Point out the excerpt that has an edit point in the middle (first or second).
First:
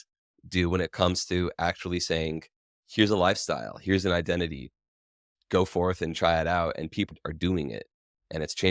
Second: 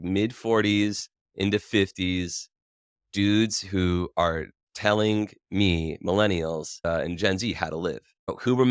first